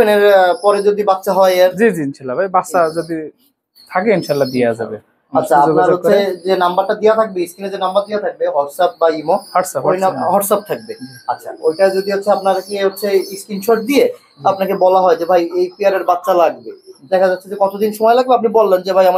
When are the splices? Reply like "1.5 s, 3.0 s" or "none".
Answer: none